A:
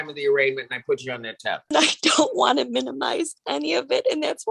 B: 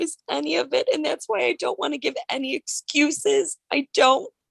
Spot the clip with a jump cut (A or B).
A